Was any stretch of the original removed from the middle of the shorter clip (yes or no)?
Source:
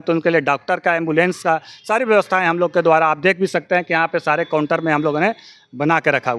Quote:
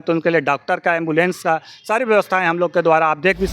no